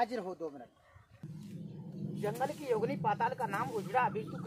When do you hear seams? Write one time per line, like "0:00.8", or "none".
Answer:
0:01.3